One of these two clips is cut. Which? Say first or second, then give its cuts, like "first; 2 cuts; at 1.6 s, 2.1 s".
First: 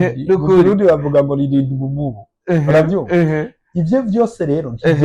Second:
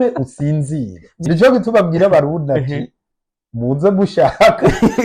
second; 1 cut; at 1.2 s